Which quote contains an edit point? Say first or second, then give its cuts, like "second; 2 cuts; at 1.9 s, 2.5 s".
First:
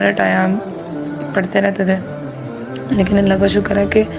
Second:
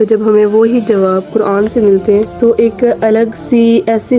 second; 1 cut; at 2.3 s